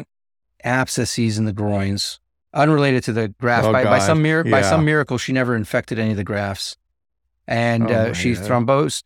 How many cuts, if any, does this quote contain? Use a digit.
1